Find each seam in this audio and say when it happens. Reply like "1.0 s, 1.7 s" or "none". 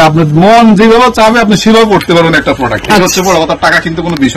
none